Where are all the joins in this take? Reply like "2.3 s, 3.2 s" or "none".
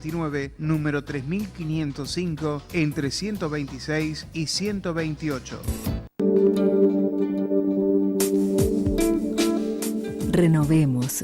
6.1 s